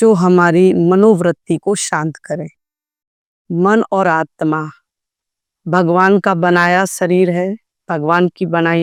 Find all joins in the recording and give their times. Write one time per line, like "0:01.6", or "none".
none